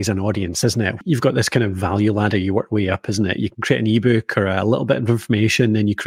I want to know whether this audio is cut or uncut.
cut